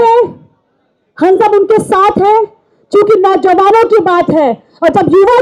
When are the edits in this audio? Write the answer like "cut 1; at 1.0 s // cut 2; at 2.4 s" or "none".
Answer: none